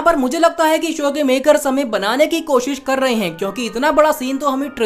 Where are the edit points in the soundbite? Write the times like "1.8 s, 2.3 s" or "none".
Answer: none